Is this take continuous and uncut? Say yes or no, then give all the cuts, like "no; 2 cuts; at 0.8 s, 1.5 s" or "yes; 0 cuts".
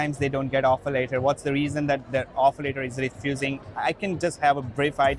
yes; 0 cuts